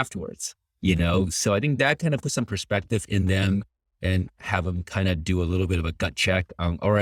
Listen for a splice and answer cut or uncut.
uncut